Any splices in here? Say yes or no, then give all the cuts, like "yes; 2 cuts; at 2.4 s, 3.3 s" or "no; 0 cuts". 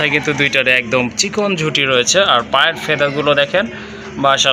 no; 0 cuts